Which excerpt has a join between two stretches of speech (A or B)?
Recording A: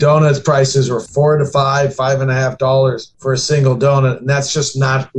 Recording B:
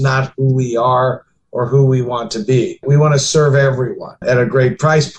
A